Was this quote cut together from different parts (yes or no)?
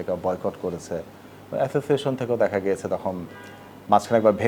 no